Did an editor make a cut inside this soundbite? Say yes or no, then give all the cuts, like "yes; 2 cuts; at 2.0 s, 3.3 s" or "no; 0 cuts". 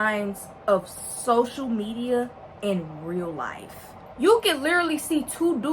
yes; 1 cut; at 4.1 s